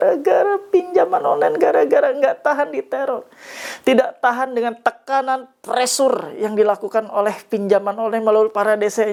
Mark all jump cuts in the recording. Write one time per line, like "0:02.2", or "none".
none